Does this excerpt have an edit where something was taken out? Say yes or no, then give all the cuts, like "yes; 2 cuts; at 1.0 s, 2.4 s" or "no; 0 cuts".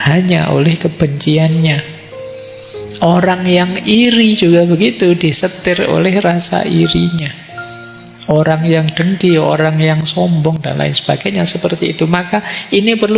no; 0 cuts